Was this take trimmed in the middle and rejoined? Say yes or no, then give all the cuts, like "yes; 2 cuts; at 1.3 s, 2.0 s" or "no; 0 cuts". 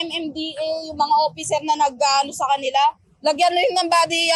no; 0 cuts